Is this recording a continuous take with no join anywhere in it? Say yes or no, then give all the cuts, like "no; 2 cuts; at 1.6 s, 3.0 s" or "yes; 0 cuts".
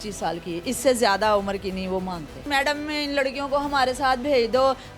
no; 1 cut; at 2.4 s